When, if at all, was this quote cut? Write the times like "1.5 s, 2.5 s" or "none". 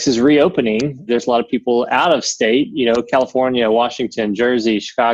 1.1 s